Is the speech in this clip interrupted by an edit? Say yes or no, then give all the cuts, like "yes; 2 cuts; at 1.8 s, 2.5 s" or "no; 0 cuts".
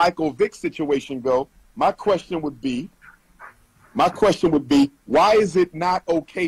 no; 0 cuts